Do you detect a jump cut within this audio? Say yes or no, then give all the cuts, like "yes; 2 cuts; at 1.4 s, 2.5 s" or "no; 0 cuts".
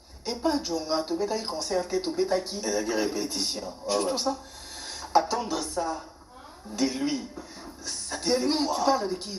no; 0 cuts